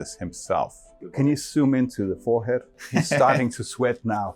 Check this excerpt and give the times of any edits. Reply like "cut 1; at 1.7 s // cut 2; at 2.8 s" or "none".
cut 1; at 1.2 s

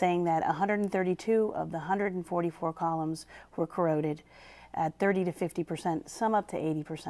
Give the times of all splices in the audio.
cut 1; at 3.9 s

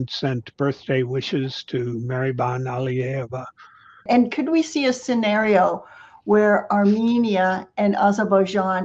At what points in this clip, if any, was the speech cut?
cut 1; at 3.8 s

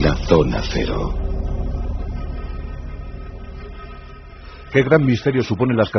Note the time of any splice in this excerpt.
none

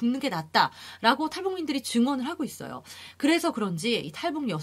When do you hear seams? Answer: none

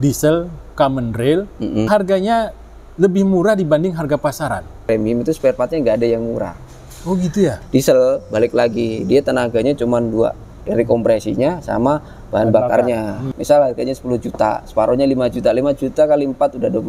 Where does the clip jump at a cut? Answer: cut 1; at 1.9 s // cut 2; at 4.9 s // cut 3; at 7.6 s // cut 4; at 13.2 s

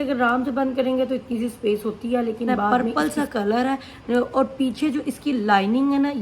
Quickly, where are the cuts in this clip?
cut 1; at 2.7 s

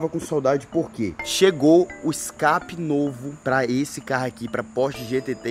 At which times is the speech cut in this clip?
none

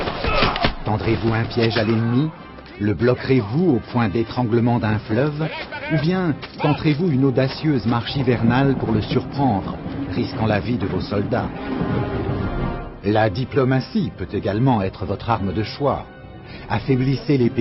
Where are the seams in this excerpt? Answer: cut 1; at 6.3 s

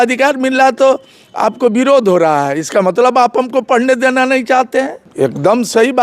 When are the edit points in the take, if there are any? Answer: cut 1; at 5.0 s

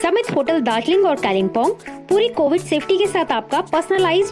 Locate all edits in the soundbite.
none

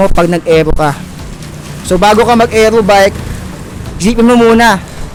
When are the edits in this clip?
none

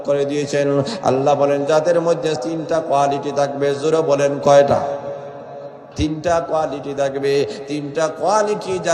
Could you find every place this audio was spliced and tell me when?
cut 1; at 2.4 s // cut 2; at 5.9 s

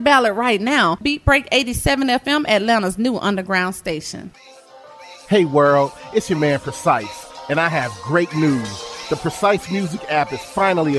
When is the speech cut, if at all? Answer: cut 1; at 4.2 s

